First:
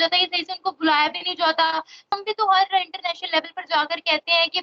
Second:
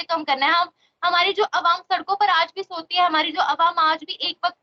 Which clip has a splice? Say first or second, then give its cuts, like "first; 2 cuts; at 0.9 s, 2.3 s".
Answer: first; 1 cut; at 2.1 s